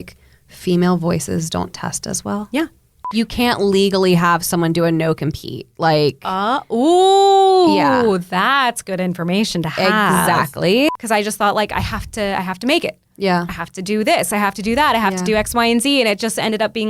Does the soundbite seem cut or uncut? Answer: cut